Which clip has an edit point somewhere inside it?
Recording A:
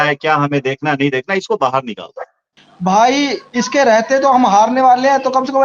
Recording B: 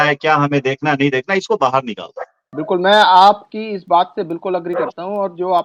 A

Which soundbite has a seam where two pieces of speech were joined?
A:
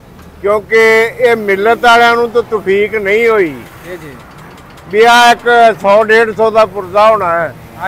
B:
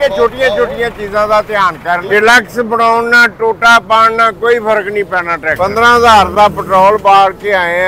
B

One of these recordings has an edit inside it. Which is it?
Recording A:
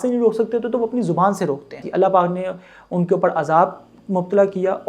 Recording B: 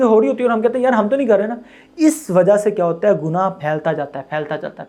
A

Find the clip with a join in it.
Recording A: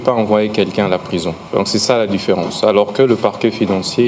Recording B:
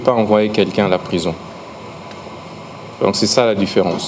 A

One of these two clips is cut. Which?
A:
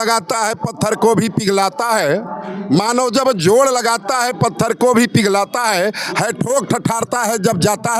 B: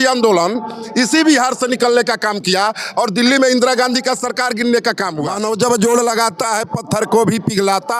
B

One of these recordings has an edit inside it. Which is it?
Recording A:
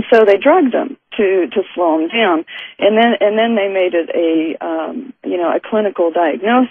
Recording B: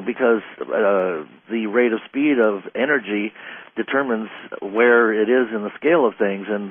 A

